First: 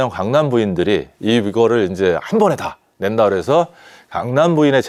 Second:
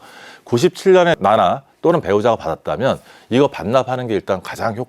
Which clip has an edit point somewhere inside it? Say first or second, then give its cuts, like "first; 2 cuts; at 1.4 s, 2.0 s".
second; 1 cut; at 1.2 s